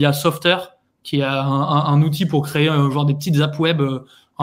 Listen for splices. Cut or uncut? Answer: uncut